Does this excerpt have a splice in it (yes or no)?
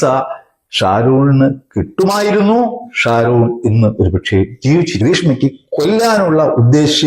yes